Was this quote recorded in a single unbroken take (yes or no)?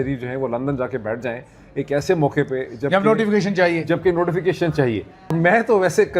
no